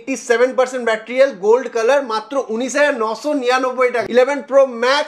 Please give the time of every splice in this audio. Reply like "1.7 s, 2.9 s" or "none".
4.0 s